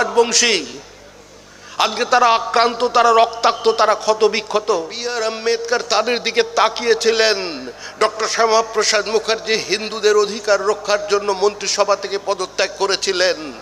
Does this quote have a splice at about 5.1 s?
yes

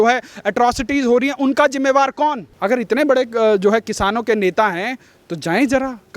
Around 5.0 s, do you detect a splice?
no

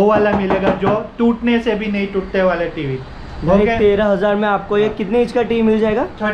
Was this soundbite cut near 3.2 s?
no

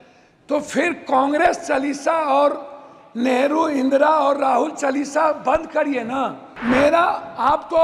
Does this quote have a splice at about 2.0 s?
no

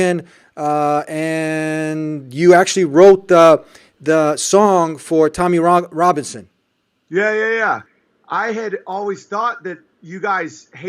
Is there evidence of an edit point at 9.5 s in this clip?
no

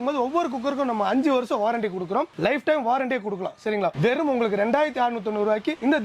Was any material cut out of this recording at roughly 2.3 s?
yes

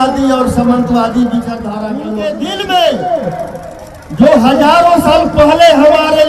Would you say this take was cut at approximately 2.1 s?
yes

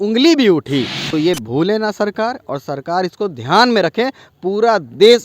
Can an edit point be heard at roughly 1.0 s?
yes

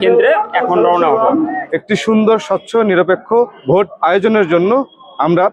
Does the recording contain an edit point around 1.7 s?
yes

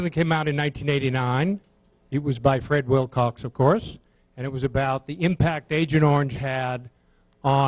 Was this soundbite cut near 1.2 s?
no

